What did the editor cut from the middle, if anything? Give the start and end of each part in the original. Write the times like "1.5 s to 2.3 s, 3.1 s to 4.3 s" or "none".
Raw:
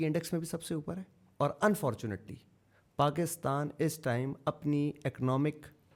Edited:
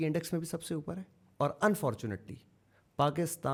none